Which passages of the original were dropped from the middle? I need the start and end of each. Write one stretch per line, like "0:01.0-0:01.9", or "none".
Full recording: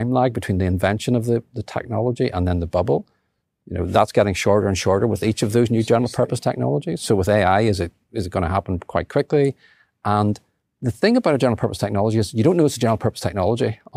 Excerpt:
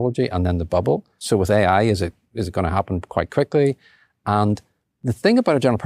0:03.2-0:06.9